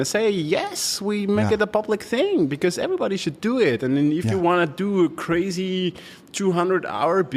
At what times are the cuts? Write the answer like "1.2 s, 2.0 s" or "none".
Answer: none